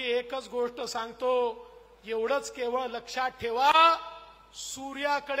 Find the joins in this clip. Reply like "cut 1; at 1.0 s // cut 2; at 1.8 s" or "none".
none